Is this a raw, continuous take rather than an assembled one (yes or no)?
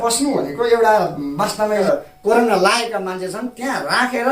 no